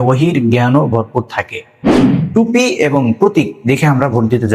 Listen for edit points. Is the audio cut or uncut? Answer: cut